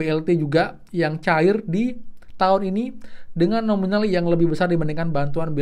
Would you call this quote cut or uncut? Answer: uncut